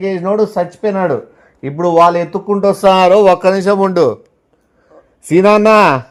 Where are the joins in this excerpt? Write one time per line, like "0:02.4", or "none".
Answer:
none